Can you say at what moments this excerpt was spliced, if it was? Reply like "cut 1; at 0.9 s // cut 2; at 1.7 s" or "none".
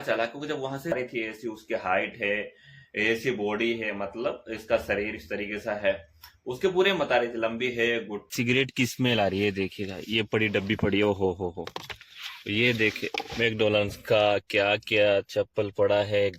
cut 1; at 0.9 s // cut 2; at 8.2 s

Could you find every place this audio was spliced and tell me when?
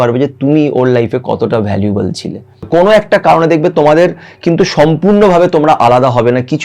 cut 1; at 2.6 s

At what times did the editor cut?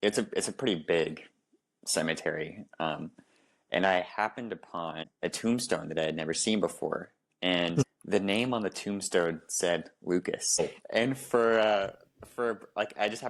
cut 1; at 5.0 s // cut 2; at 8.0 s // cut 3; at 10.6 s

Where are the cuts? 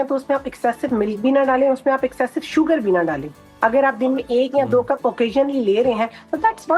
none

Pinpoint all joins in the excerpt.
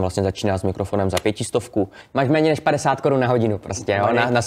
cut 1; at 2.0 s

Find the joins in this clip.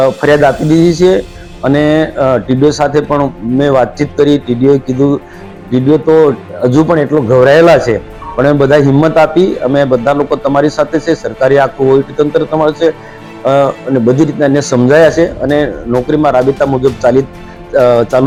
none

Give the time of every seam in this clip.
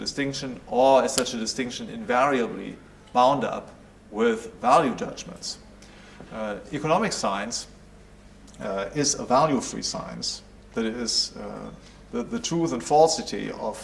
cut 1; at 12.3 s

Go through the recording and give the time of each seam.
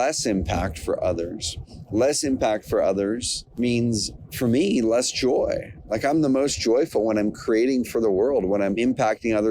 cut 1; at 3.4 s // cut 2; at 8.8 s

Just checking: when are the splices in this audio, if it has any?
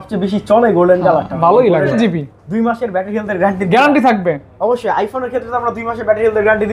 cut 1; at 1.9 s

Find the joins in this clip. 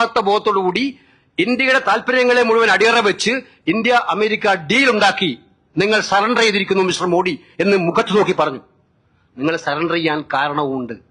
none

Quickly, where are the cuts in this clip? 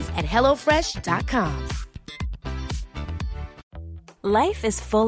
cut 1; at 3.6 s

